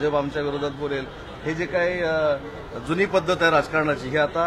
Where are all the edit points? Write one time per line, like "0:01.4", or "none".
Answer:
none